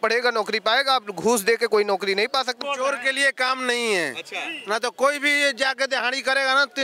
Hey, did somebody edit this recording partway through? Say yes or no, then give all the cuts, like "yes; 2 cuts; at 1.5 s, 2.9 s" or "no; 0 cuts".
yes; 1 cut; at 2.6 s